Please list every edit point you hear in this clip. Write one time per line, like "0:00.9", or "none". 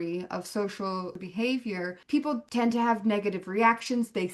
0:01.2
0:02.3